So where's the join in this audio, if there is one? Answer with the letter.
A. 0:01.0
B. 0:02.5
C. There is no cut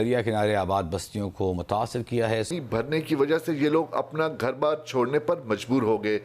B